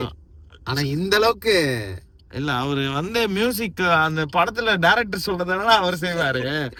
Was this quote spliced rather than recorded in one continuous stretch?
no; 0 cuts

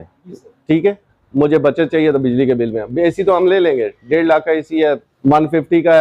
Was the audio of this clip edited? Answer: yes; 1 cut; at 5.1 s

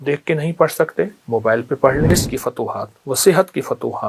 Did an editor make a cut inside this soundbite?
yes; 1 cut; at 2.1 s

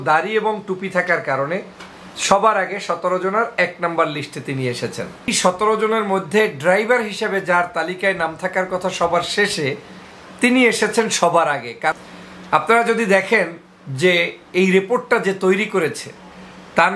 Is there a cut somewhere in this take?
yes; 2 cuts; at 5.3 s, 11.9 s

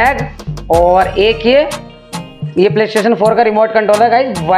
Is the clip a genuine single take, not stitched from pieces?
yes; 0 cuts

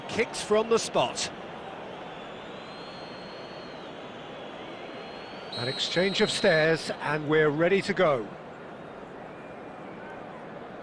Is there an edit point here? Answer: no; 0 cuts

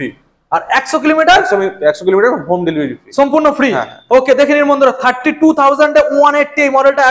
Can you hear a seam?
no; 0 cuts

